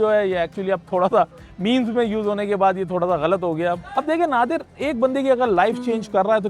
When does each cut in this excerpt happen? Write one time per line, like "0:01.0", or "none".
0:03.8